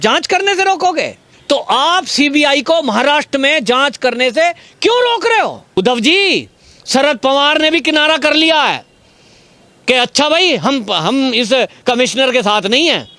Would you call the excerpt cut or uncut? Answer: cut